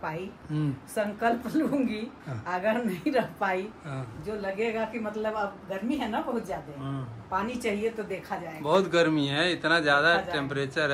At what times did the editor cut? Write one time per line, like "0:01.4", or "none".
none